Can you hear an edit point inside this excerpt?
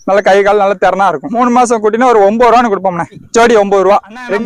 no; 0 cuts

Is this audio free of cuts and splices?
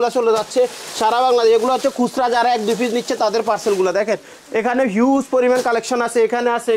yes; 0 cuts

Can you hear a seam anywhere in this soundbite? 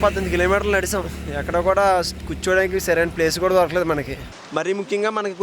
yes; 1 cut; at 4.4 s

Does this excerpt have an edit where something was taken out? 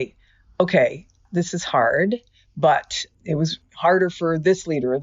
yes; 2 cuts; at 1.2 s, 3.6 s

